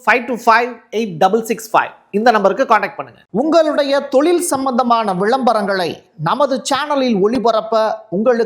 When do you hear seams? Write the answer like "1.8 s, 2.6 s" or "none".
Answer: 3.1 s